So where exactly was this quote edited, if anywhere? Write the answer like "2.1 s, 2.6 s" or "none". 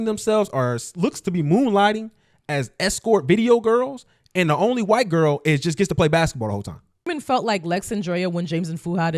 7.1 s